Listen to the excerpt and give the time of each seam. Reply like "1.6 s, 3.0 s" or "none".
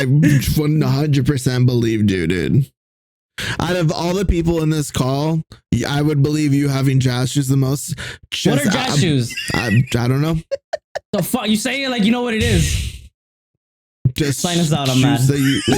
none